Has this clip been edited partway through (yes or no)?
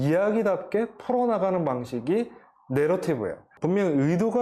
yes